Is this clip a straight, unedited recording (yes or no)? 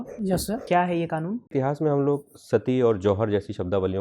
no